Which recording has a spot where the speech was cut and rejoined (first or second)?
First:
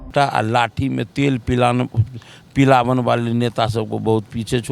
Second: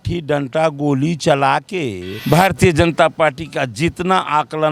second